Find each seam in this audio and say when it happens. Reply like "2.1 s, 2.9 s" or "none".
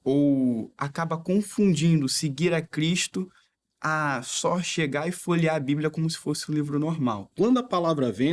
7.2 s